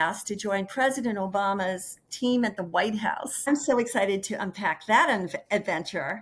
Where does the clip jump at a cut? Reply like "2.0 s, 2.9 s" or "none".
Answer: none